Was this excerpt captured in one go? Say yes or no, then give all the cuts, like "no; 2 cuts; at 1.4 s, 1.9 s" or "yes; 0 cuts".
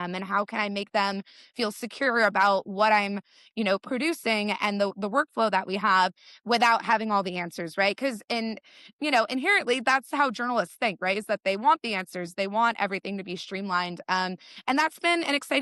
yes; 0 cuts